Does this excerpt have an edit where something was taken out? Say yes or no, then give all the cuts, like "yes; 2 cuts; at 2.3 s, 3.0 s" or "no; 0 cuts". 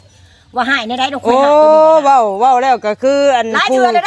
no; 0 cuts